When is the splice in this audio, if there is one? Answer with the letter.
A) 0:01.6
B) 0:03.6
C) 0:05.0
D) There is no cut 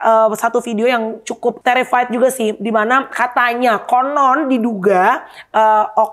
A